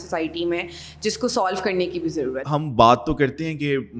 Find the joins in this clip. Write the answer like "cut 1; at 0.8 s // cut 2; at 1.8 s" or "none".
cut 1; at 2.4 s